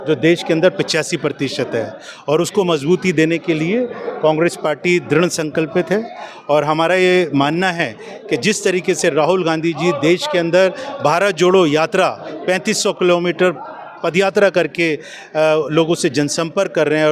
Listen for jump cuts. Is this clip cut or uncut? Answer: uncut